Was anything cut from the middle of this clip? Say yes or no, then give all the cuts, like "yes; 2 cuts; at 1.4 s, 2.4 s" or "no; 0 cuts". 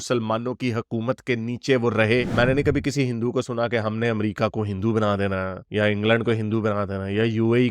yes; 1 cut; at 2.3 s